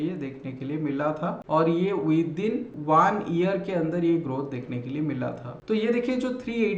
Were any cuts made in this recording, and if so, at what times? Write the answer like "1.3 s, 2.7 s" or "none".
5.5 s

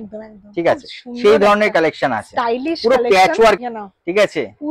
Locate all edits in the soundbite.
3.6 s

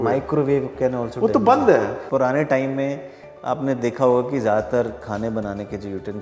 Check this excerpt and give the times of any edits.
2.0 s

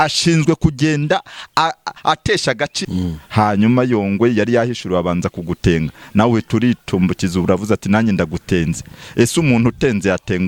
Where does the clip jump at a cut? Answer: 2.8 s

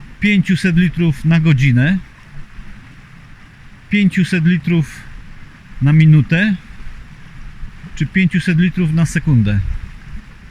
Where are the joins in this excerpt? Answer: none

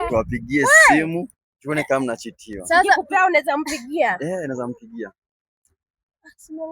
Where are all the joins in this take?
none

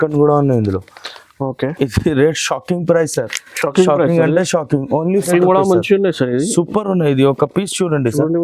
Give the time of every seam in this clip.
5.3 s

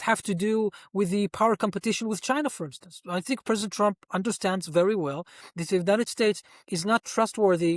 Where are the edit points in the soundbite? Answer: none

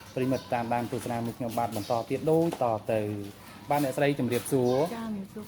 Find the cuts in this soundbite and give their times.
none

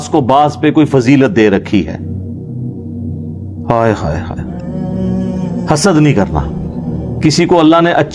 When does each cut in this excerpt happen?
4.3 s, 5.6 s

